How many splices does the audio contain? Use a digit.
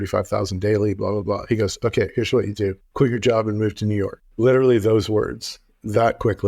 2